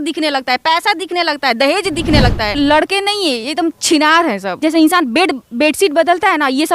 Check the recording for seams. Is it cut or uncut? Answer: cut